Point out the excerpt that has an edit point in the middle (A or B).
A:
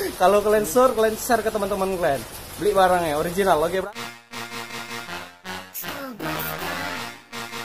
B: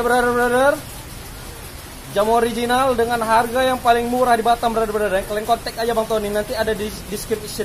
A